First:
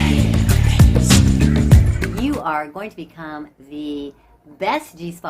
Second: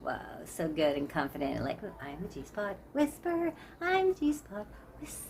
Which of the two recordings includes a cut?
first; 1 cut; at 2.0 s

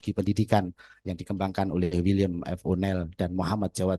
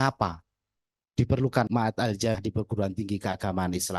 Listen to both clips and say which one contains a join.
second; 1 cut; at 1.7 s

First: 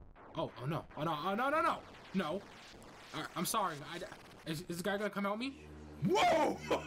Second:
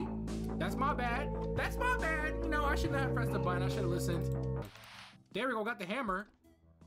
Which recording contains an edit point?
second; 1 cut; at 4.6 s

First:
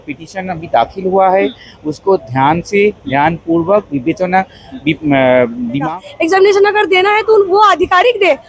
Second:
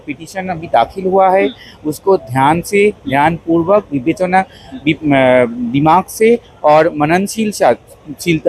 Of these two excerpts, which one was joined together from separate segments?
first; 1 cut; at 5.8 s

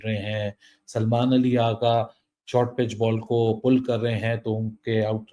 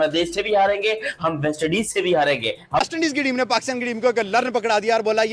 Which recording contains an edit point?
second; 1 cut; at 2.8 s

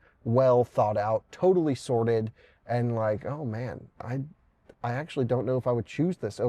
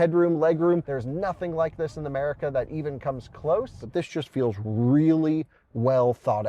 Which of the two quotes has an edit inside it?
second; 2 cuts; at 0.9 s, 3.8 s

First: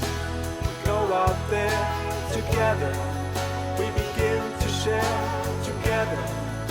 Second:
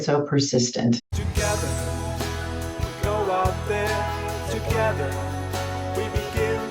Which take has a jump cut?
second; 1 cut; at 1.1 s

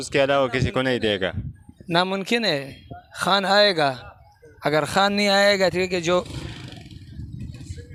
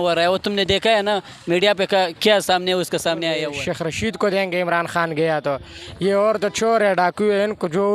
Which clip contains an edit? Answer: second; 1 cut; at 3.4 s

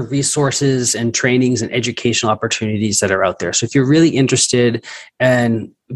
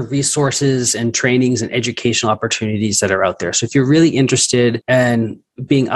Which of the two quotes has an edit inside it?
second; 1 cut; at 4.8 s

